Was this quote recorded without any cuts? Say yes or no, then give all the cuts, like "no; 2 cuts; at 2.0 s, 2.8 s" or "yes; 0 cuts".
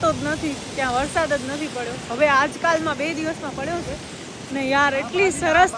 yes; 0 cuts